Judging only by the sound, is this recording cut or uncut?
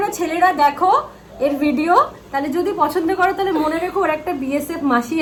uncut